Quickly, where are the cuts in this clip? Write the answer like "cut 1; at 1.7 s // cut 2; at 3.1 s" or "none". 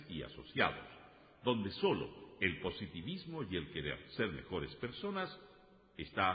none